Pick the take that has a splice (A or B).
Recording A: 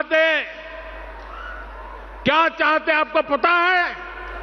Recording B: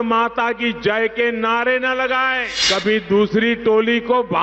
B